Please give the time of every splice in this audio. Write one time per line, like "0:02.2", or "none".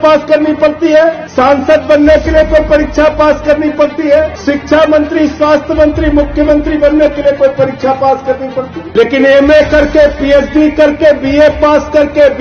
0:01.2
0:04.4
0:08.8